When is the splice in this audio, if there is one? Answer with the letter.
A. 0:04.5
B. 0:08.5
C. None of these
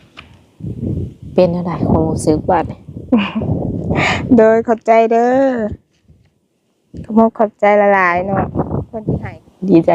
B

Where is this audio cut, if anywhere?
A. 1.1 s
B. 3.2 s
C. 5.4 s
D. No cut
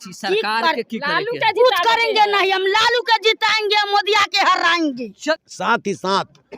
C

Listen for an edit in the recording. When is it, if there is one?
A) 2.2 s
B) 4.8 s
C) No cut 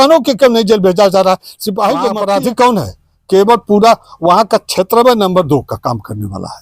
A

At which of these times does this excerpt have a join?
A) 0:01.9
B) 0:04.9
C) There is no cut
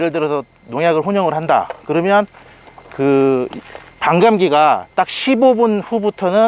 C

